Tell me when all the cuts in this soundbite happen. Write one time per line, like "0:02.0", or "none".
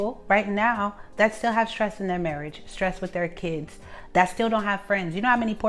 none